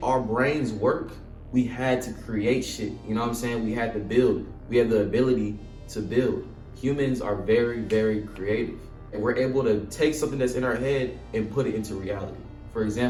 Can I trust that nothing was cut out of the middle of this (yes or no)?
yes